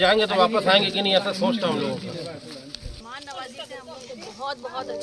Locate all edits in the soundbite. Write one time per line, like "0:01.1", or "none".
0:02.9